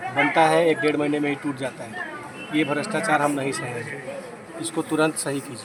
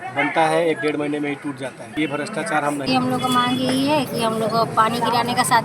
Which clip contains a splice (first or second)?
second